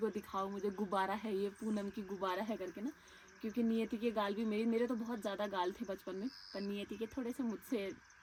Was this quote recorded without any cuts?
yes; 0 cuts

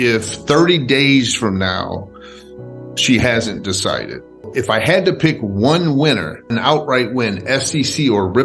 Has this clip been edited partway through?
yes; 2 cuts; at 4.5 s, 6.4 s

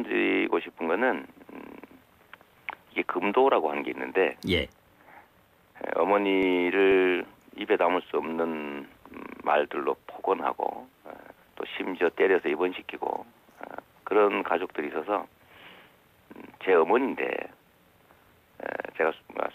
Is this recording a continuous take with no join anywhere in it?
yes; 0 cuts

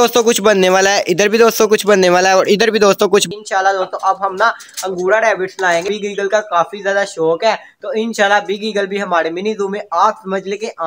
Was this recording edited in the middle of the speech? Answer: yes; 2 cuts; at 3.3 s, 5.8 s

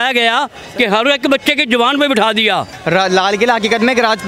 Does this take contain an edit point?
yes; 1 cut; at 2.7 s

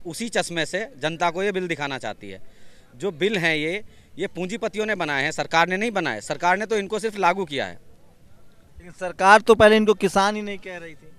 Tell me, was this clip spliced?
no; 0 cuts

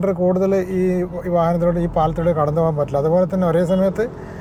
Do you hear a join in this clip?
no; 0 cuts

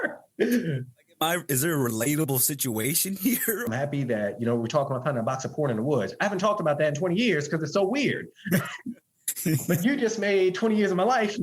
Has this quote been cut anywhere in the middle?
yes; 1 cut; at 3.7 s

